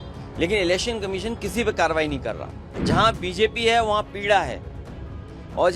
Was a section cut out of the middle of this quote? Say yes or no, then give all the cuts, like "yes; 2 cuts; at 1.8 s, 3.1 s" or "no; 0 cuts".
yes; 1 cut; at 2.8 s